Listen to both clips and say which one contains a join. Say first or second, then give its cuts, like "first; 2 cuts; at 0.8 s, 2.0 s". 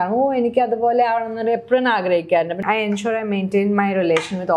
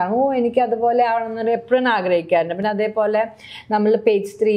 first; 1 cut; at 2.6 s